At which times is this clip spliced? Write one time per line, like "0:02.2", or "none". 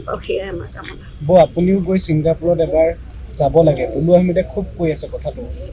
none